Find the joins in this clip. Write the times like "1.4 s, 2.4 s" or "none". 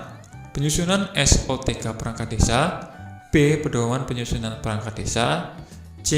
none